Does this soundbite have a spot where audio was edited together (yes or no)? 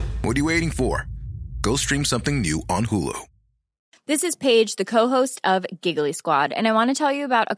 yes